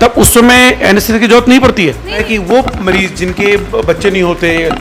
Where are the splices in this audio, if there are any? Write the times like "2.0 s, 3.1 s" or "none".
2.2 s